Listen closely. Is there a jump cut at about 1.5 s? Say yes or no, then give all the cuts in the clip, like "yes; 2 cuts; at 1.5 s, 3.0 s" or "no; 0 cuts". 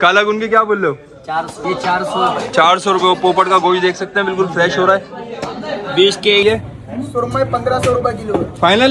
yes; 2 cuts; at 1.5 s, 6.4 s